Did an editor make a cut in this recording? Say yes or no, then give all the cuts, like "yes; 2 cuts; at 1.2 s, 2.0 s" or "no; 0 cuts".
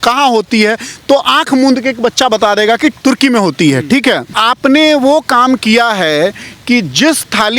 yes; 1 cut; at 4.3 s